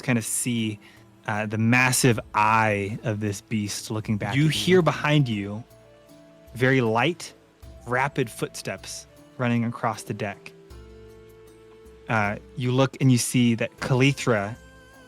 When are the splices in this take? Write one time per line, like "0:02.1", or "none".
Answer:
0:04.3